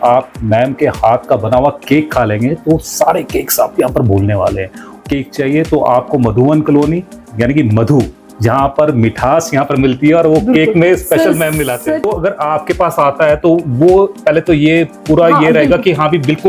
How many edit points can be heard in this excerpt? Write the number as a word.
two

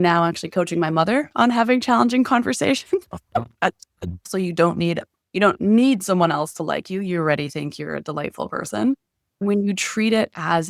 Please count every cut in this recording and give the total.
two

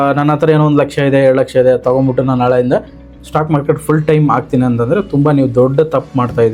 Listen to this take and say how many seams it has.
zero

